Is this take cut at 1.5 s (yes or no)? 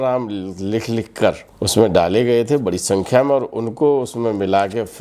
yes